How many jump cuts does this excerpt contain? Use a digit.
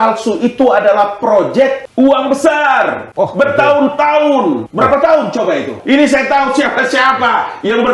4